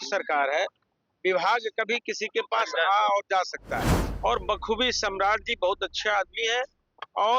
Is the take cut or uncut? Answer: cut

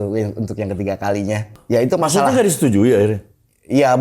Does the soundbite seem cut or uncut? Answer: cut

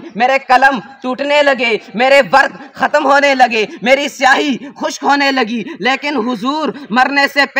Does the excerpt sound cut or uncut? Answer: uncut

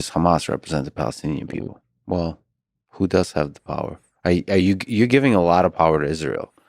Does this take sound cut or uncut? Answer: cut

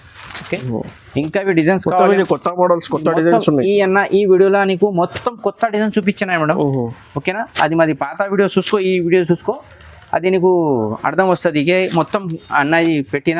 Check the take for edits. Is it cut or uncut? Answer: uncut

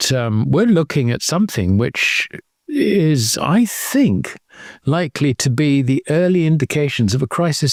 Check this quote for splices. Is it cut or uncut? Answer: uncut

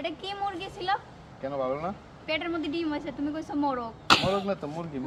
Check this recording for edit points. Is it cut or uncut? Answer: uncut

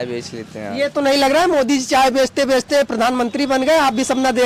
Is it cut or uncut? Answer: uncut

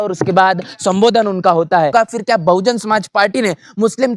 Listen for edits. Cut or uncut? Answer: cut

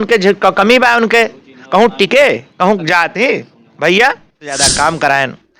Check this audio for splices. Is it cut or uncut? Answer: cut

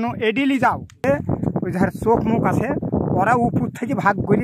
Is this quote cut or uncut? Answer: cut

